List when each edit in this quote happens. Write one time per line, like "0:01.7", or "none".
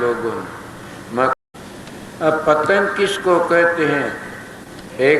0:01.4